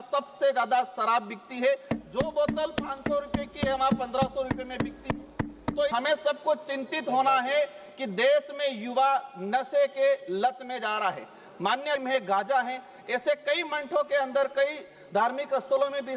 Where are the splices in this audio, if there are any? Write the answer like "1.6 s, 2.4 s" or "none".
5.9 s, 12.0 s